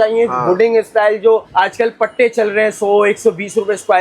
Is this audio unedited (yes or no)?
no